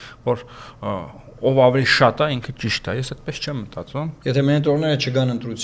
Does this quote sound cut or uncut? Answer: cut